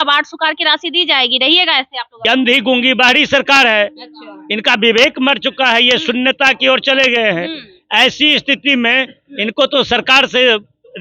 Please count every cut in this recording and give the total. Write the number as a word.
one